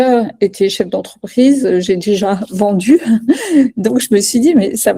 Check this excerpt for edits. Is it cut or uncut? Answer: uncut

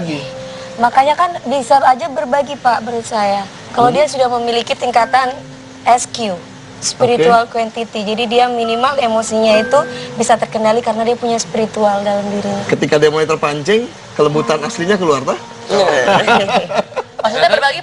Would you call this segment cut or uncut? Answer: uncut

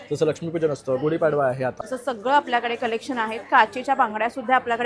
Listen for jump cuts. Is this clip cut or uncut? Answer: cut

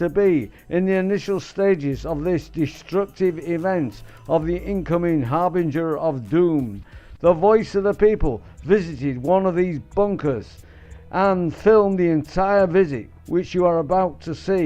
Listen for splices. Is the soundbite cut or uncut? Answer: uncut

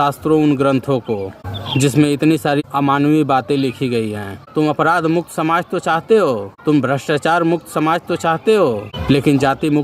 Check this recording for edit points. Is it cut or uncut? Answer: cut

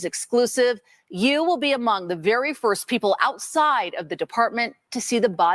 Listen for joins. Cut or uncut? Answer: uncut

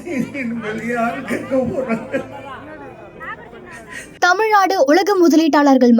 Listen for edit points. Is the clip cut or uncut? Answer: cut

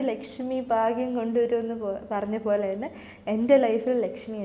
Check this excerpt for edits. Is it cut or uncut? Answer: uncut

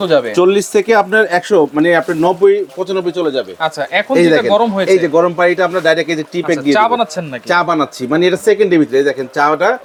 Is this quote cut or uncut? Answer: uncut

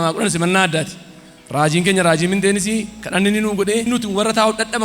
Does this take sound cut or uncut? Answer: uncut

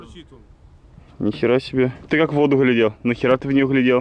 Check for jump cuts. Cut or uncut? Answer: cut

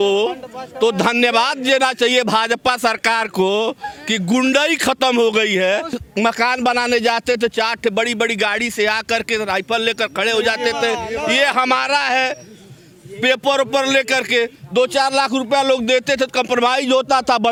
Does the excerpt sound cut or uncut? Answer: uncut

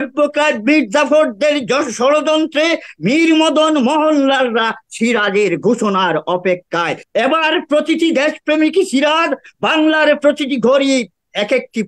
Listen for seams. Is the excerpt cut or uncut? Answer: cut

